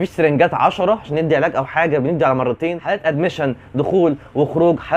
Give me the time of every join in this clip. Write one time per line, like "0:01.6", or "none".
0:02.8